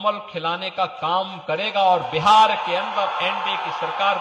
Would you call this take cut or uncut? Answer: uncut